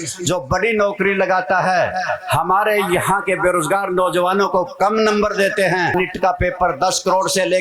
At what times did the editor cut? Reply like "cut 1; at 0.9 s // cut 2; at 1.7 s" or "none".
cut 1; at 5.9 s